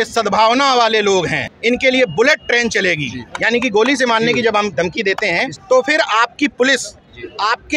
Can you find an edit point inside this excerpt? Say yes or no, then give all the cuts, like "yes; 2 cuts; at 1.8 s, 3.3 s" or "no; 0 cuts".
yes; 2 cuts; at 1.4 s, 5.5 s